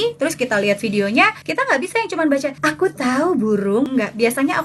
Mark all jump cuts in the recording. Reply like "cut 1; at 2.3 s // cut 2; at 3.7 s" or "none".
cut 1; at 1.4 s // cut 2; at 2.5 s // cut 3; at 3.9 s